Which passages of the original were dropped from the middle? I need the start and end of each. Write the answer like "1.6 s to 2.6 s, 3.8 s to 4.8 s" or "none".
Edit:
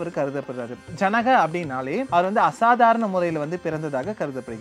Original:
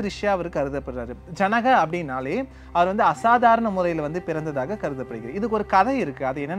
2.4 s to 2.7 s